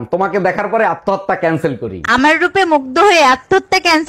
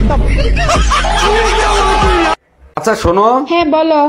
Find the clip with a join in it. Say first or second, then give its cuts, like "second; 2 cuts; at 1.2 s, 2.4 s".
second; 1 cut; at 2.5 s